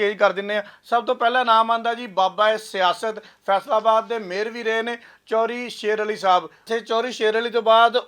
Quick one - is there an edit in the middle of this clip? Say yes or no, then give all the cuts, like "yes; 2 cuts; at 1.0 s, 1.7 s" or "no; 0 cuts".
yes; 1 cut; at 6.6 s